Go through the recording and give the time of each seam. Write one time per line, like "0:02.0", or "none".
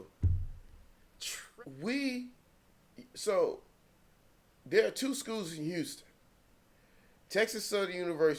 0:01.5